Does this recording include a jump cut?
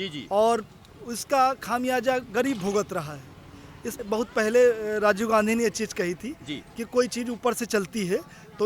yes; 1 cut; at 4.0 s

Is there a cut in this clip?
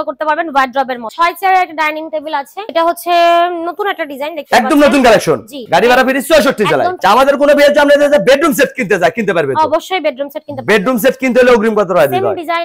yes; 3 cuts; at 1.0 s, 5.6 s, 7.0 s

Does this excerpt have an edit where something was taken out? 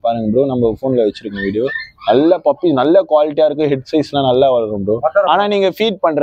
no; 0 cuts

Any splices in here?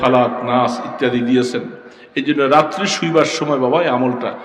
no; 0 cuts

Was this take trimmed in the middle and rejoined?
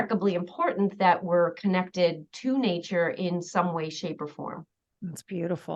no; 0 cuts

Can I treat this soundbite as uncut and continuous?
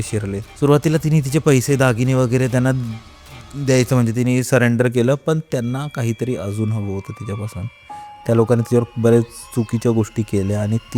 yes; 0 cuts

